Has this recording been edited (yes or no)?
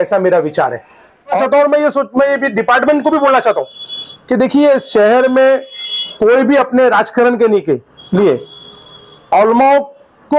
yes